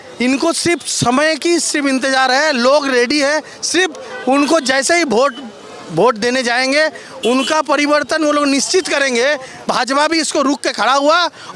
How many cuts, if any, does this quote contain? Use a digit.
1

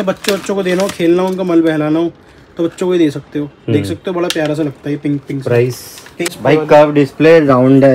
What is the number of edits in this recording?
1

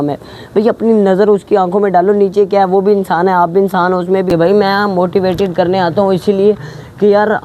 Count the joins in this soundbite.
1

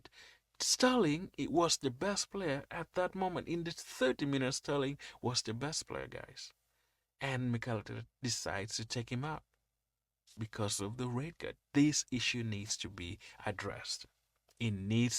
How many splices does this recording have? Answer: 1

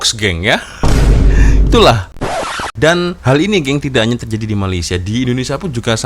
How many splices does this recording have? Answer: 1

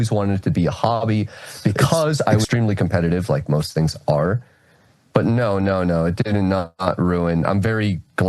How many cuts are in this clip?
1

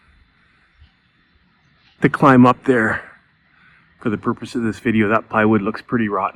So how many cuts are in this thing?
0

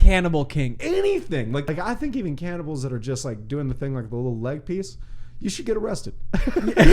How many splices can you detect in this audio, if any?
1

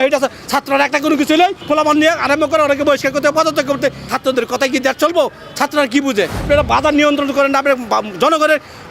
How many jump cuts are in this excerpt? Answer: 3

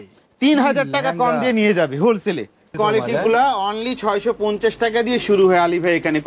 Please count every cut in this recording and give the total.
1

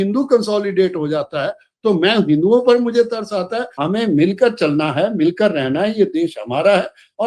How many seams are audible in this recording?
1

